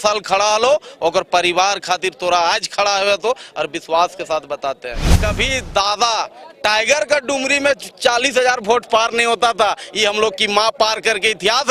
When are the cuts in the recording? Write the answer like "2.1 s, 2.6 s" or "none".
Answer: 5.1 s